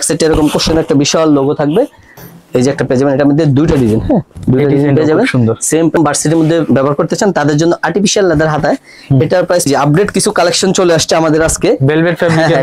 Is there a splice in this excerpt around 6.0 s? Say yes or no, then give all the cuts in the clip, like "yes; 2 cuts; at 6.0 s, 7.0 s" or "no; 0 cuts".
yes; 3 cuts; at 2.1 s, 6.0 s, 9.7 s